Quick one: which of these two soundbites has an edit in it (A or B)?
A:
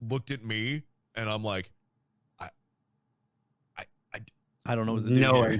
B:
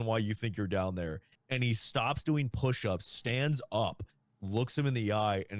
A